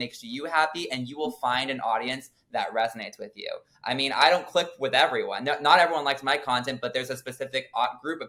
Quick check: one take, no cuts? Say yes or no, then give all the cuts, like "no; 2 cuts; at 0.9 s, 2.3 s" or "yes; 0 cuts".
yes; 0 cuts